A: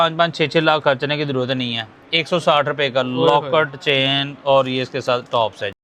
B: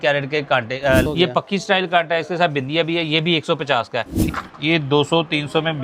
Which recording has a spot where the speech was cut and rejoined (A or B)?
B